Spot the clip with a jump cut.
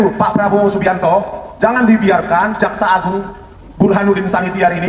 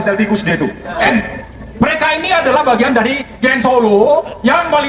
second; 1 cut; at 1.1 s

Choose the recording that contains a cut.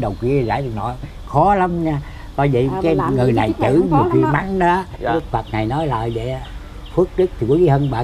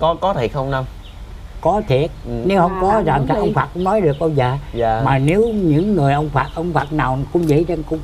first; 1 cut; at 5.1 s

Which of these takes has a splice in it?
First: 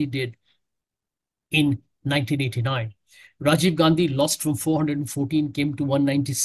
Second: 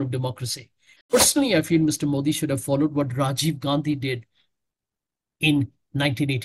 second; 1 cut; at 1.1 s

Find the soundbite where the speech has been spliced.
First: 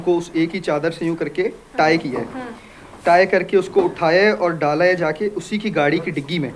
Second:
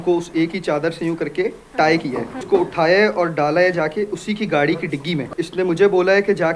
second; 2 cuts; at 2.4 s, 5.3 s

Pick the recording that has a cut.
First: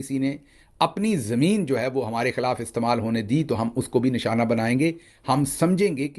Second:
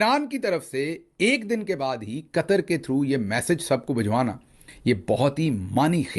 second; 1 cut; at 4.7 s

